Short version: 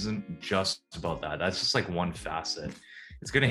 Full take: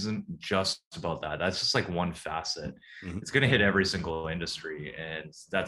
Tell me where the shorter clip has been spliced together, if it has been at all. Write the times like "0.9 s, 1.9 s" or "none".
none